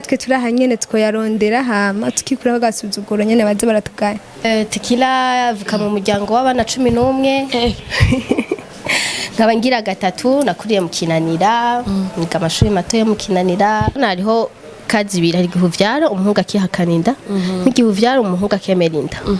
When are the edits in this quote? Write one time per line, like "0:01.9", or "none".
0:04.4
0:14.0